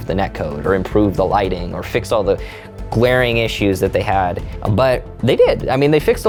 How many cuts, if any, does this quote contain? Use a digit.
0